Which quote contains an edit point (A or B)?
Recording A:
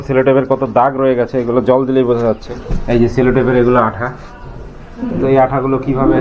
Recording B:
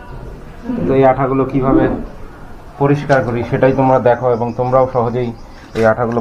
A